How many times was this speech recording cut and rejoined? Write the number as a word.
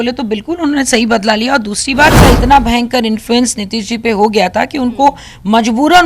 one